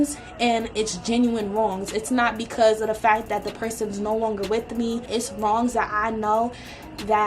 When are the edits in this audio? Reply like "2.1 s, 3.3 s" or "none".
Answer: 5.1 s